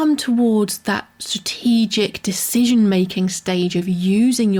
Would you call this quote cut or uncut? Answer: uncut